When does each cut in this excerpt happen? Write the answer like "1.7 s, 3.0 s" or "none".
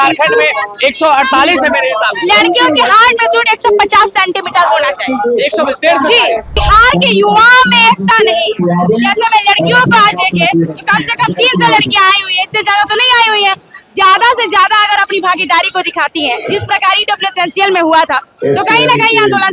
6.6 s